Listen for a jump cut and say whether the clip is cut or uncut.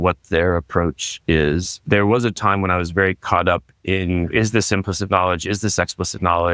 cut